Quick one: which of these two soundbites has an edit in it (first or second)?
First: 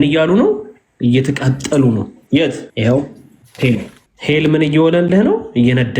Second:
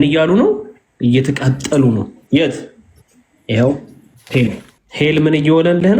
first